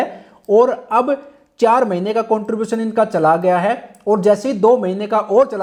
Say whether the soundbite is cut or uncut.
uncut